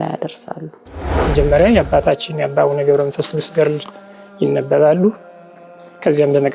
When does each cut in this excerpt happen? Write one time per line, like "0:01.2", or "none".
0:01.2